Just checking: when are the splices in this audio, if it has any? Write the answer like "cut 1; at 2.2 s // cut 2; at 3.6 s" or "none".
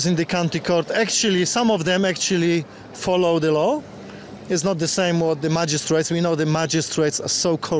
none

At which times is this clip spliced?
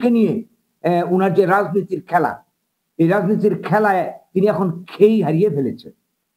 none

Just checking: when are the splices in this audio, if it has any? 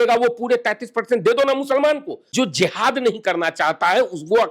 cut 1; at 2.3 s

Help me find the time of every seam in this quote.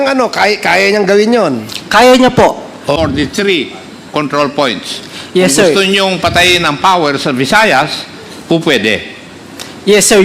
cut 1; at 3.0 s

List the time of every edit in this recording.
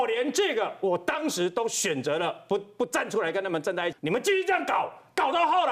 cut 1; at 4.0 s

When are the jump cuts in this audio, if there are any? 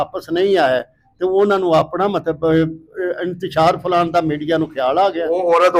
none

